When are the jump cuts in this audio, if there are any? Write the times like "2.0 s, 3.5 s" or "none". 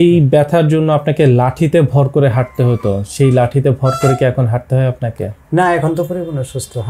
none